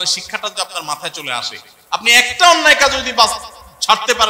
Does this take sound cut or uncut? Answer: uncut